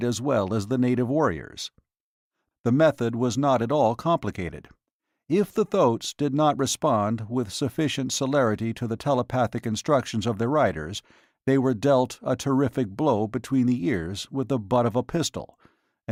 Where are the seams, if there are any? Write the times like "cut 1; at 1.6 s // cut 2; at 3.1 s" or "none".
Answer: none